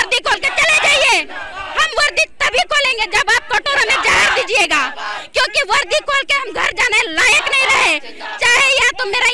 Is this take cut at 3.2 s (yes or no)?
no